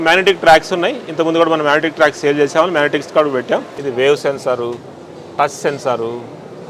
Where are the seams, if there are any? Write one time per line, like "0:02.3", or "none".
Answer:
0:03.8